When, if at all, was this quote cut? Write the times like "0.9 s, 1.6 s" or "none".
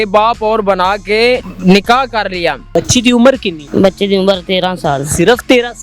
1.5 s, 2.6 s, 3.5 s